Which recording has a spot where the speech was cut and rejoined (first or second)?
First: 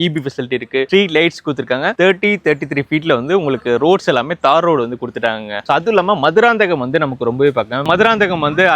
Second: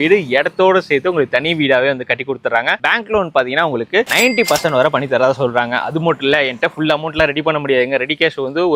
first